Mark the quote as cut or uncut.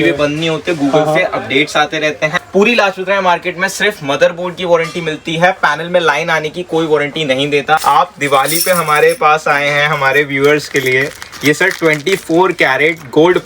cut